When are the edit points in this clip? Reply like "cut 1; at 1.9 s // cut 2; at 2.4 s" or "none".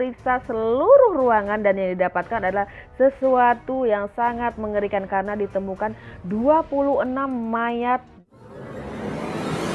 cut 1; at 8.6 s